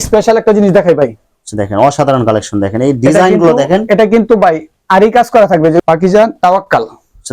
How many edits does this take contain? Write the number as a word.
one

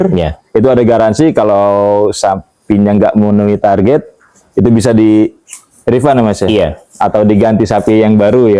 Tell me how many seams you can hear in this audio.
zero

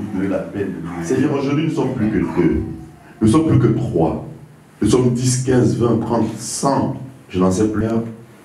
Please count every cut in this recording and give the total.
one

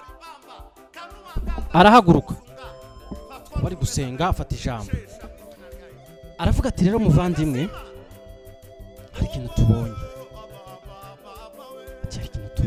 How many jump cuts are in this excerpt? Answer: zero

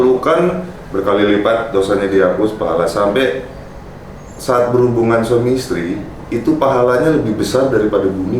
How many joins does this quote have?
zero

